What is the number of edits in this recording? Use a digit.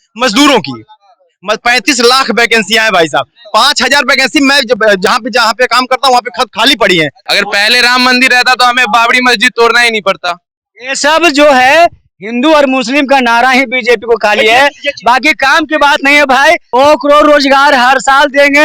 2